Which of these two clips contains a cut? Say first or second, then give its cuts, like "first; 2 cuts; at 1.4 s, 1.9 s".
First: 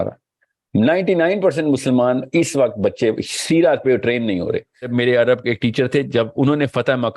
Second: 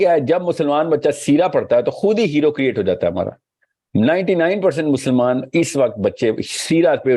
first; 1 cut; at 4.9 s